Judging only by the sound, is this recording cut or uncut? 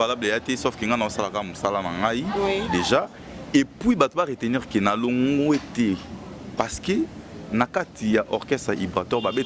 uncut